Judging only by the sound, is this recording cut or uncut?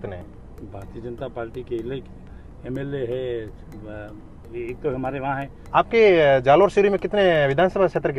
cut